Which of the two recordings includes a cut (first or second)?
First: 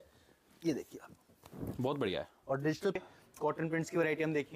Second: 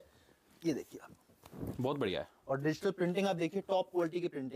first